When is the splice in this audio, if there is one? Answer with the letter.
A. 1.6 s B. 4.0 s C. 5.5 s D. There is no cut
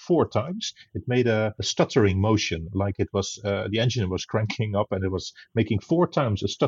A